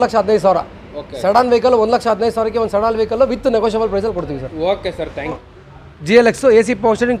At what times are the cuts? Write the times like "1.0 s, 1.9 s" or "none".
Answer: 5.4 s

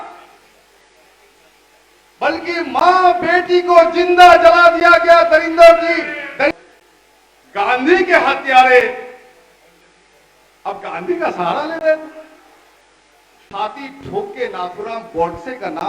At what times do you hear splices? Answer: 6.5 s, 13.5 s

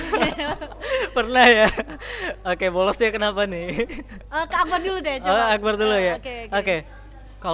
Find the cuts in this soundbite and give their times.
none

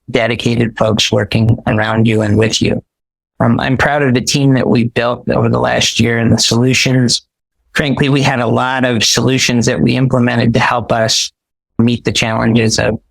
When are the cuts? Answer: 11.8 s

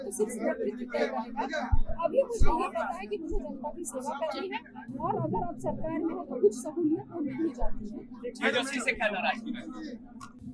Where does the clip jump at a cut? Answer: none

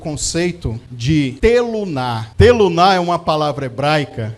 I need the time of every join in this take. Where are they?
1.1 s, 2.2 s

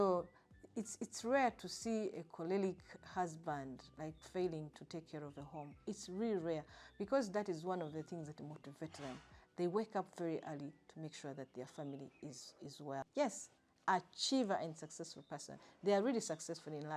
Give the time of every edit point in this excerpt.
13.0 s

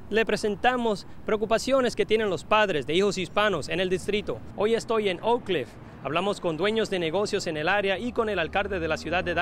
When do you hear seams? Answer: 4.5 s

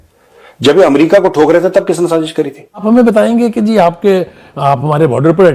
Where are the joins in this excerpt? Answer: 2.8 s

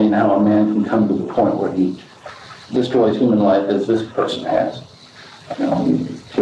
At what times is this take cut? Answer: none

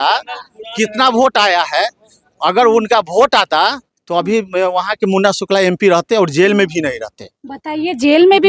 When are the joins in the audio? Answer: none

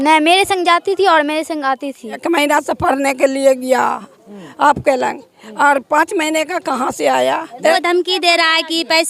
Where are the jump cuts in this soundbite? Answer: 2.1 s, 7.7 s

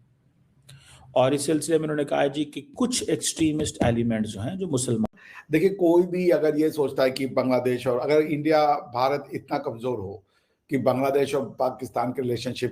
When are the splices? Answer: 5.1 s

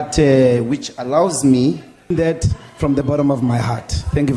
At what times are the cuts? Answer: 2.1 s

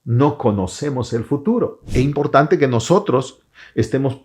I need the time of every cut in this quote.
1.8 s

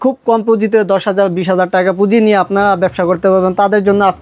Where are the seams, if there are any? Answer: none

